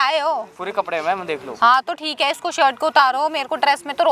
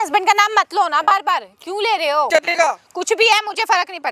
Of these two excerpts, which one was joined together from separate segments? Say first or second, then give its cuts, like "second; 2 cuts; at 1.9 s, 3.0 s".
second; 1 cut; at 2.3 s